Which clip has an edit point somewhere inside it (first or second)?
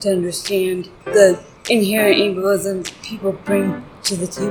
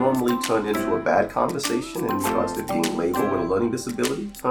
first